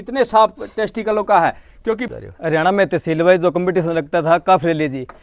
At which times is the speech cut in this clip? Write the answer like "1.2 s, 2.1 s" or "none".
2.1 s